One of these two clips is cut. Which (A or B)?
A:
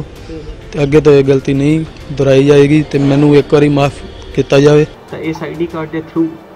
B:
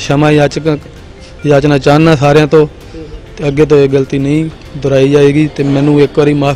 A